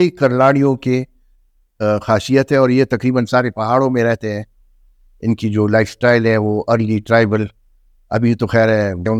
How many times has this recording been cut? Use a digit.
0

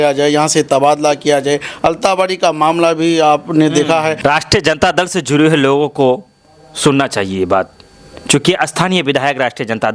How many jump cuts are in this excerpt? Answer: 1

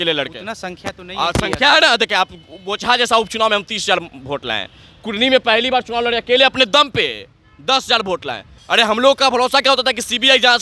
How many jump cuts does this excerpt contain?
1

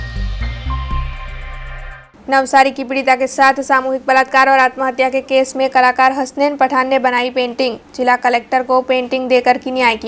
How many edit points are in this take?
1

